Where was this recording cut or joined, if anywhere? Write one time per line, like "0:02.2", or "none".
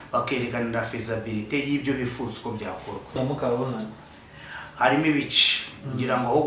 0:03.2